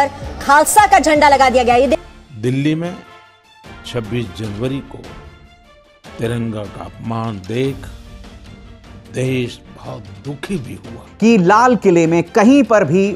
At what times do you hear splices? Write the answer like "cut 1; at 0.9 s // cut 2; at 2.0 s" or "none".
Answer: cut 1; at 2.0 s // cut 2; at 11.1 s